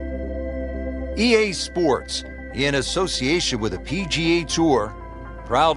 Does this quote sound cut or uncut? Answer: cut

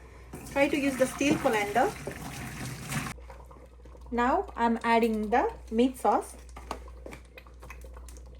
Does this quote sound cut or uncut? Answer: cut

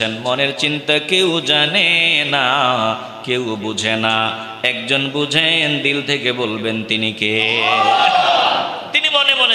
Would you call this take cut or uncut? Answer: uncut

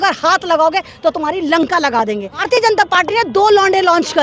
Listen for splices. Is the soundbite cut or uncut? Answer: cut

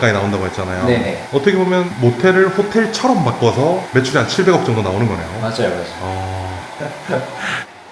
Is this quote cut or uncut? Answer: uncut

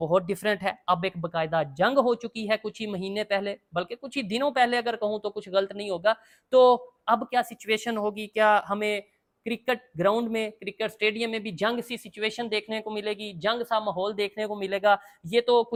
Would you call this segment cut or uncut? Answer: uncut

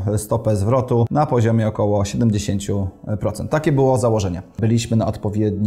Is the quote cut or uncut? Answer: cut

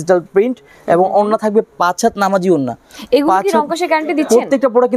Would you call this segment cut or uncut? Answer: uncut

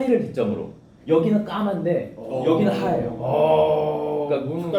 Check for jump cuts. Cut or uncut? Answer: uncut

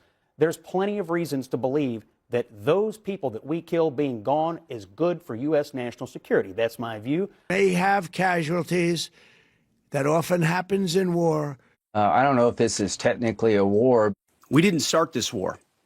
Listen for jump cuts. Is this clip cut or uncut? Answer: cut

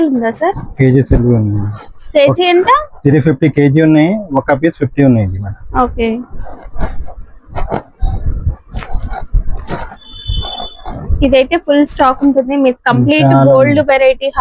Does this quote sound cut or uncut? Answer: uncut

